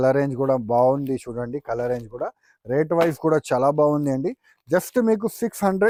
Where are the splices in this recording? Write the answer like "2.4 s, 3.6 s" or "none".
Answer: none